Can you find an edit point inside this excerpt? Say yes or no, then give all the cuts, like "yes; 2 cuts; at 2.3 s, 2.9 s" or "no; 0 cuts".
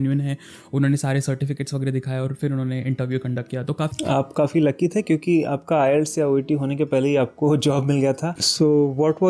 yes; 2 cuts; at 3.9 s, 8.2 s